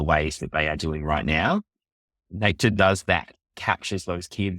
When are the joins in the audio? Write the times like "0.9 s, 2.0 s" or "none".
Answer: 2.2 s, 3.6 s